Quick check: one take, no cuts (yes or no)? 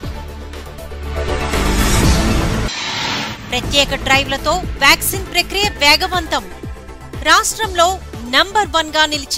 no